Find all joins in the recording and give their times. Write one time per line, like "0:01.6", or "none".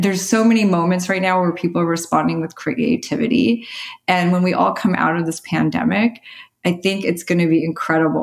none